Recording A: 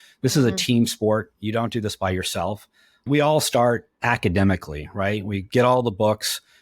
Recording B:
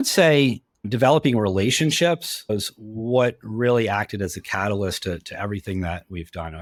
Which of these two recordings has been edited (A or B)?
A